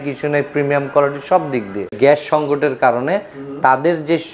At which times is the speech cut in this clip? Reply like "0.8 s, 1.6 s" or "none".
1.9 s

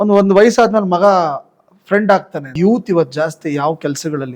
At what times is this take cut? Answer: 2.5 s

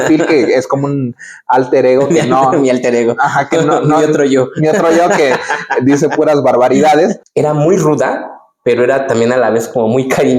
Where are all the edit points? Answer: 7.2 s

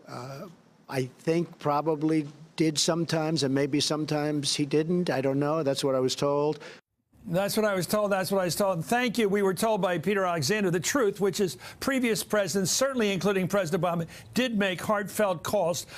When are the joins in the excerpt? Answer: none

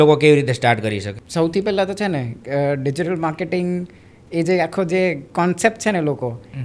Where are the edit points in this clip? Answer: 1.2 s

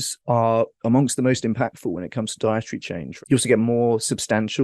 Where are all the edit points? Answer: 3.1 s

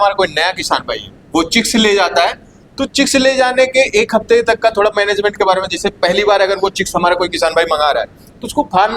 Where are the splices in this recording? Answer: none

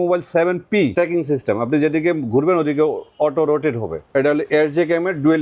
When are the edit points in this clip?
0.9 s, 4.0 s

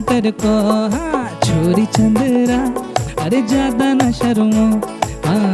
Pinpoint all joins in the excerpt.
none

